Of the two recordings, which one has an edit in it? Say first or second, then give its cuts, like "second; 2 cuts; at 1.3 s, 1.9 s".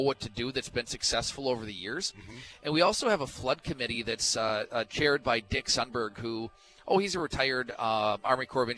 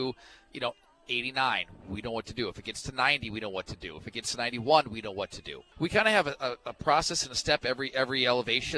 second; 1 cut; at 5.6 s